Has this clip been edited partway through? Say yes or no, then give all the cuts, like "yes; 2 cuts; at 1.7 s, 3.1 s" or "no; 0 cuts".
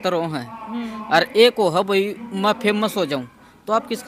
no; 0 cuts